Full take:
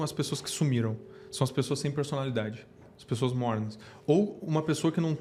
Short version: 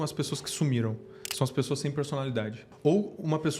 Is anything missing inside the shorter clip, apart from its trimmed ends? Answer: yes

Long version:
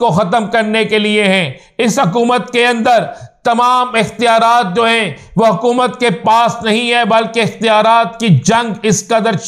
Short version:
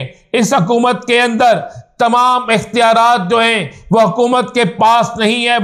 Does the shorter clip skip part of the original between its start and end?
no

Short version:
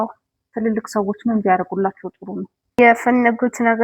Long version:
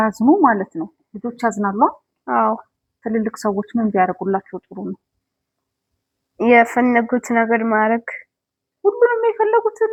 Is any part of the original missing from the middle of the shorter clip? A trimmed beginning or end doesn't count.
yes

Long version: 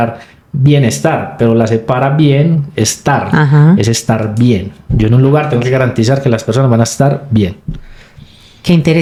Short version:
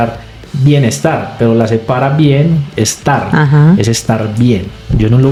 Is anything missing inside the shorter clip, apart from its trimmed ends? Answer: no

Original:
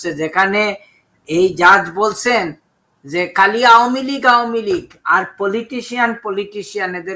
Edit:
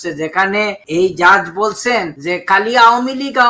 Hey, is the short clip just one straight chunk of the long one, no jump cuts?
no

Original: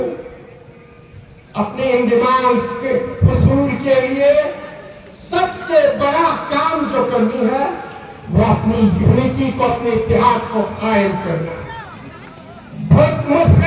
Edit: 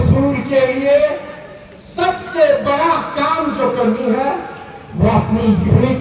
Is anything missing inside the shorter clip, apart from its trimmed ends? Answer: no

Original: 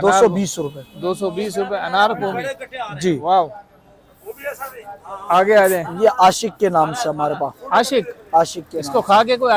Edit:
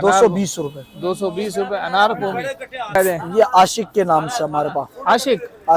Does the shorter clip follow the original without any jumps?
no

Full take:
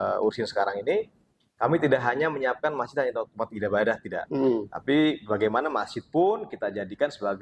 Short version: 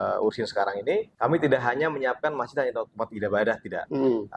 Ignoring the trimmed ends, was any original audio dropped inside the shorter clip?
yes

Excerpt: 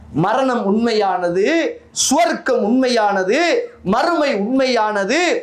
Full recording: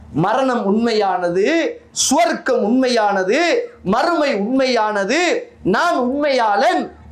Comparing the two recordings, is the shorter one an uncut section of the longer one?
yes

